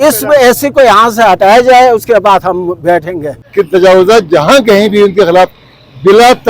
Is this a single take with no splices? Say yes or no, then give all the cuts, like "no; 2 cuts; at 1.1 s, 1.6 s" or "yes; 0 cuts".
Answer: no; 1 cut; at 3.4 s